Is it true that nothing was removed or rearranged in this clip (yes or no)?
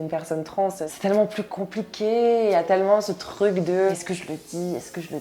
no